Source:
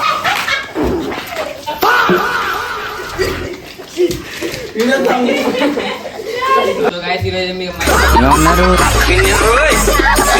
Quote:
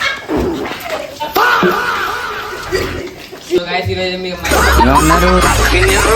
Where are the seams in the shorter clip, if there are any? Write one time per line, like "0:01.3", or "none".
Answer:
0:03.6